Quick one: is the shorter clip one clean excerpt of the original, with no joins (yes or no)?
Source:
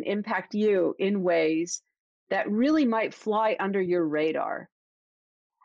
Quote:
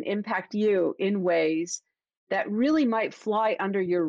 yes